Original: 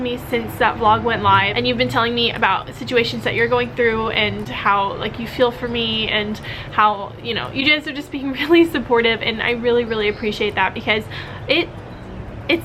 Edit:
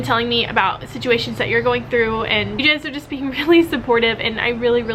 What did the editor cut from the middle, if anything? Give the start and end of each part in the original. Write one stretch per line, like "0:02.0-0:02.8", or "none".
0:04.4-0:07.6